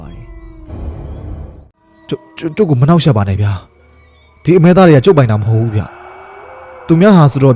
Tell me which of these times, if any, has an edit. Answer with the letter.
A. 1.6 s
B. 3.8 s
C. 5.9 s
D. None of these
A